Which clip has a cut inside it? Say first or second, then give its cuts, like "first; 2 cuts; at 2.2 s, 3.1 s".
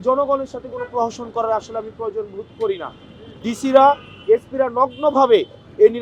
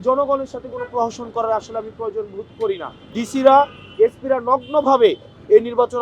second; 1 cut; at 3.0 s